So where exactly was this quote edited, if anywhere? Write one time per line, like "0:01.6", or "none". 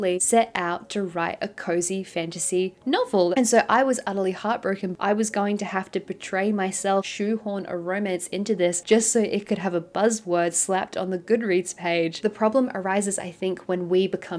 0:03.3
0:04.9
0:07.1
0:12.2